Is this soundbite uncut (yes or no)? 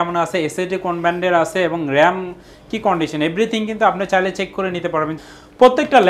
no